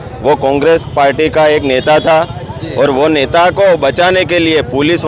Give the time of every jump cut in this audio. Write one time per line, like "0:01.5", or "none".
none